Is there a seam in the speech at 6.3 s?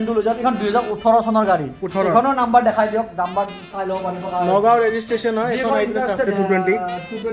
yes; 1 cut; at 6.3 s

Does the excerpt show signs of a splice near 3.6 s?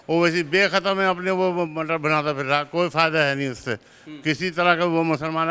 no; 0 cuts

